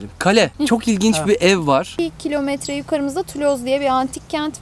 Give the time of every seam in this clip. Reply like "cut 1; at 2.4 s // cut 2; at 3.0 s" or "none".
cut 1; at 1.9 s